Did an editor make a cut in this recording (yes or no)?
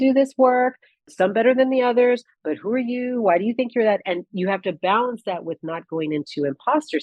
yes